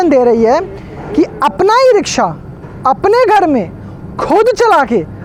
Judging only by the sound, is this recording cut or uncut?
uncut